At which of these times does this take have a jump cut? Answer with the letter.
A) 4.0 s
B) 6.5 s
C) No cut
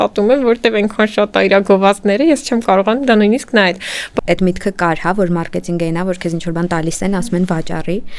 A